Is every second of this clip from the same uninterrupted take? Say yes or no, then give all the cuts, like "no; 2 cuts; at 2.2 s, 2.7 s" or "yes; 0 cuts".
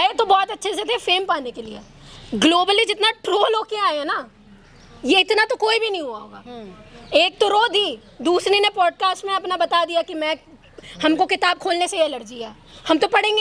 yes; 0 cuts